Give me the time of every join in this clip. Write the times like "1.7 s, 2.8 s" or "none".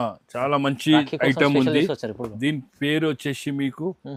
none